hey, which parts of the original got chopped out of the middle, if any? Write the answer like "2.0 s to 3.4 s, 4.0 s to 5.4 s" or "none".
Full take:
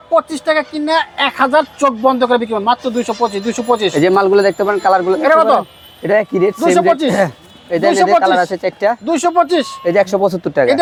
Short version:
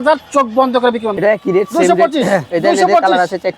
2.6 s to 6.0 s, 7.4 s to 7.7 s